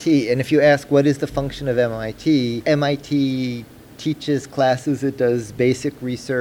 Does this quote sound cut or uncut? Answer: cut